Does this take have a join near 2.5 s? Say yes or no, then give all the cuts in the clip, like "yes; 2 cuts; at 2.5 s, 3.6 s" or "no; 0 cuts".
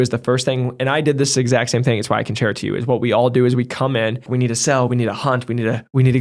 no; 1 cut; at 4.2 s